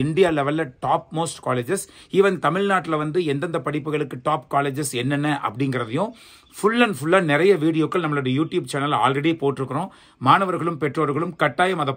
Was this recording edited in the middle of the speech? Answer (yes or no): no